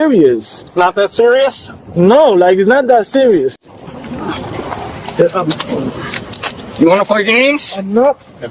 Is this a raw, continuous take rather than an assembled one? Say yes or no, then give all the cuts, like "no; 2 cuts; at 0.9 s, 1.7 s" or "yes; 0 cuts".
yes; 0 cuts